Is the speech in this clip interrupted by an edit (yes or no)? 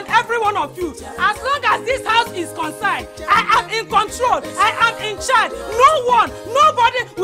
no